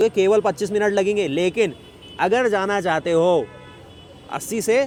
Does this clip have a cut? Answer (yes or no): no